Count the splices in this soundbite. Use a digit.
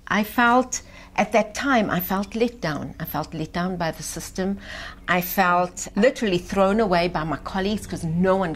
1